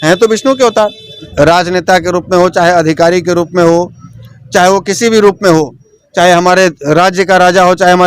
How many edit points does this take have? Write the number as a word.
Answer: one